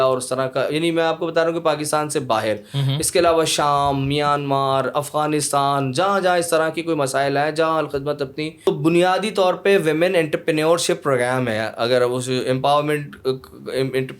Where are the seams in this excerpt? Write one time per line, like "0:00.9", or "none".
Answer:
0:08.6